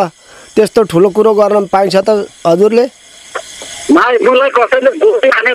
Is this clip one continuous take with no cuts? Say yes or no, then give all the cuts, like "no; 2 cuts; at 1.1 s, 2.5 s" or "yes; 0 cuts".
yes; 0 cuts